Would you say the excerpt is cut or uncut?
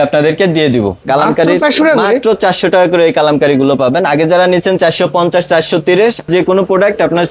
cut